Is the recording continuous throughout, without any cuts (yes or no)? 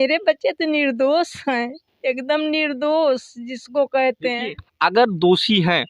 yes